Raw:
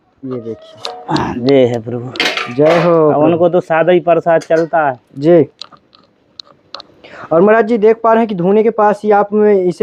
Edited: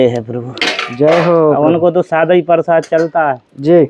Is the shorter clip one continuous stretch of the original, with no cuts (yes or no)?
yes